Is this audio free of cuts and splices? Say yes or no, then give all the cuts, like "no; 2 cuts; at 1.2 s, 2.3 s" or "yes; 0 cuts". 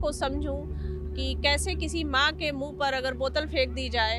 yes; 0 cuts